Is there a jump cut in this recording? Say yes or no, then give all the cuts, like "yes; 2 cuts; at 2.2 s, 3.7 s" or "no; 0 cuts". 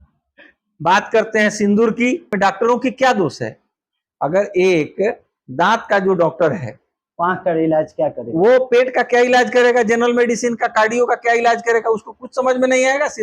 yes; 1 cut; at 2.3 s